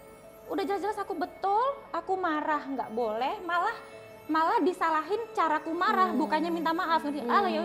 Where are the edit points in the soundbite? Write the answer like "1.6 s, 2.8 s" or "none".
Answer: none